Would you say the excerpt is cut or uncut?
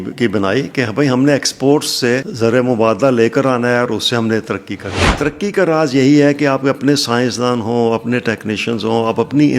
cut